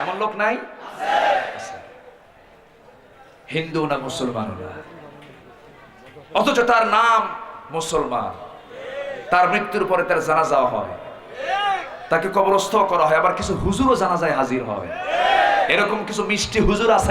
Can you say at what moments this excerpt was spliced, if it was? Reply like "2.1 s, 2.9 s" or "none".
none